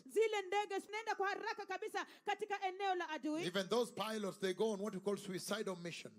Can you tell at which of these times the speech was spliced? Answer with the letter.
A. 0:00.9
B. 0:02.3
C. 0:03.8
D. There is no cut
A